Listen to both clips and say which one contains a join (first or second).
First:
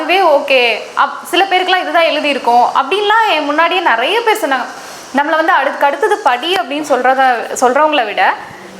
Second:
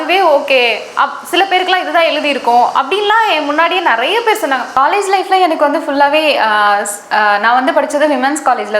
second